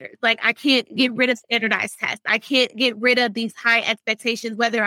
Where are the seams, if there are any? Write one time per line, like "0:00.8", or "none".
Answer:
none

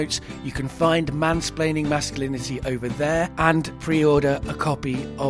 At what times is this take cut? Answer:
0:03.5

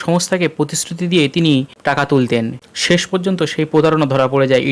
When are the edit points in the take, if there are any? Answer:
0:01.7
0:02.7

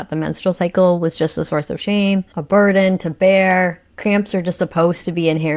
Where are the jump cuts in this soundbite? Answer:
0:02.3

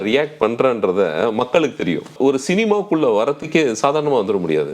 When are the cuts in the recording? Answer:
0:02.1

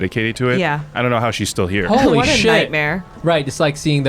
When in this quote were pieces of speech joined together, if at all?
0:03.1

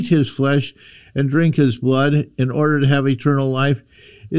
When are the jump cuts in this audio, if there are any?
none

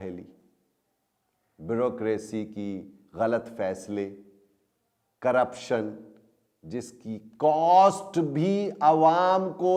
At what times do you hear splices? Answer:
none

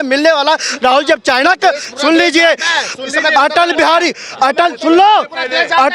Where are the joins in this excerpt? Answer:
none

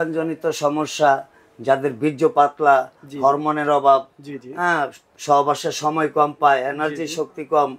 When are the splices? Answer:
none

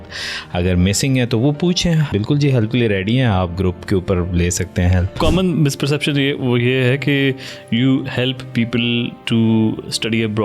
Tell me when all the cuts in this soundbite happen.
0:02.1
0:05.2

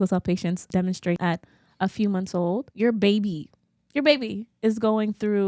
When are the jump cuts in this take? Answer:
0:01.1
0:02.7

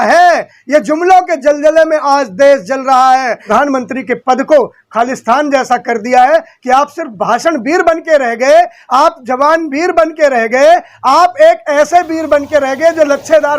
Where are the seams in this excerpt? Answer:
0:03.4

